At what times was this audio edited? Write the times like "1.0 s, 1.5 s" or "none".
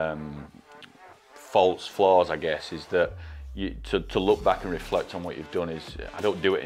none